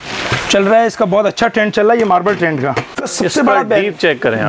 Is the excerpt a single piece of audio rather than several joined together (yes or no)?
no